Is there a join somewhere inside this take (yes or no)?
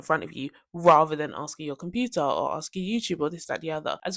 no